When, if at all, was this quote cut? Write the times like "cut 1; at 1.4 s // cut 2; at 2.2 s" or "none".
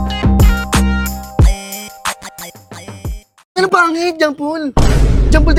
none